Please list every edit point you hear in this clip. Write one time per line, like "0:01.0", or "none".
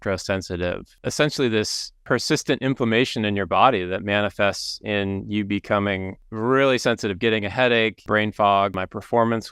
0:00.9
0:01.9
0:06.2
0:08.0
0:08.7